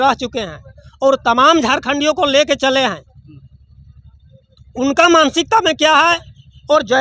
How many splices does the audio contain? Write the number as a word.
zero